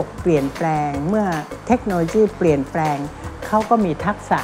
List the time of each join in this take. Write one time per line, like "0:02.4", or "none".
none